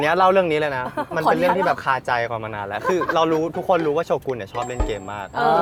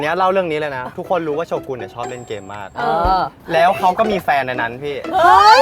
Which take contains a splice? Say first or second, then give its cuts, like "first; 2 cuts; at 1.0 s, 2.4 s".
second; 2 cuts; at 1.0 s, 3.4 s